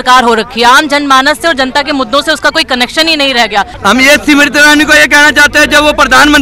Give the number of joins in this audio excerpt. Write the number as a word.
one